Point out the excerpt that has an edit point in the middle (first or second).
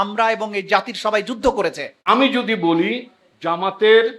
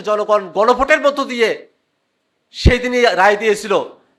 first